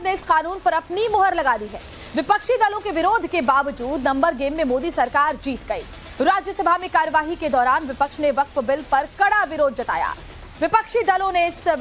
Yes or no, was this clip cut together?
yes